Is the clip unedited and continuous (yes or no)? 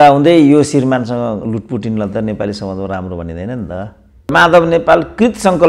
no